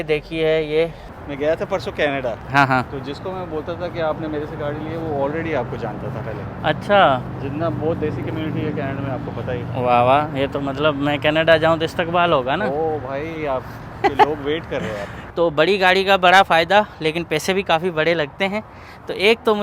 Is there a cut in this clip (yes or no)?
yes